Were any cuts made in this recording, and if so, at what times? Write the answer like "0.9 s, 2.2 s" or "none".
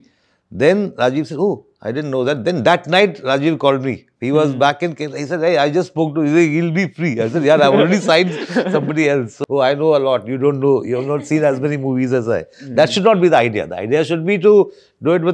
9.3 s